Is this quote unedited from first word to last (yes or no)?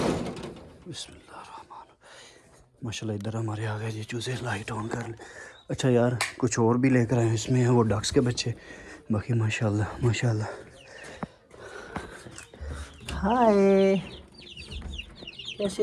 yes